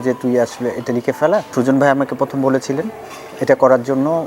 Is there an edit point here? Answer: yes; 1 cut; at 1.5 s

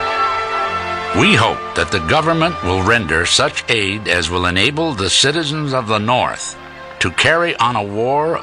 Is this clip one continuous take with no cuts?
yes; 0 cuts

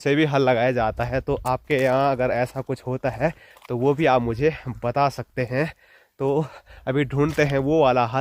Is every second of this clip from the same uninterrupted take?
yes; 0 cuts

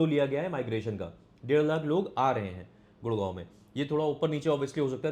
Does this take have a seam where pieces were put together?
no; 0 cuts

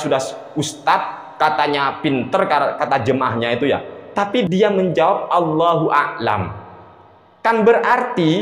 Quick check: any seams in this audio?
yes; 1 cut; at 4.5 s

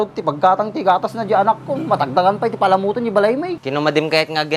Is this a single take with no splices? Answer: no; 1 cut; at 3.6 s

